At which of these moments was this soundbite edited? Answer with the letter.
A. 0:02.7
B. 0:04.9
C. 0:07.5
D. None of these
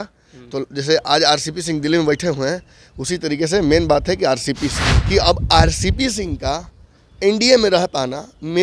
B